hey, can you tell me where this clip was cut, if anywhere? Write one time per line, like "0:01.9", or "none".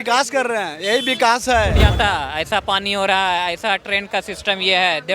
0:01.9